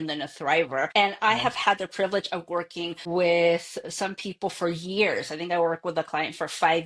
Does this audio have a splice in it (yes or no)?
yes